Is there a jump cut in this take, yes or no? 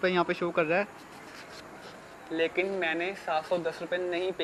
no